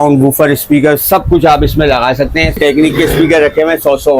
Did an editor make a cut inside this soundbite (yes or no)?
yes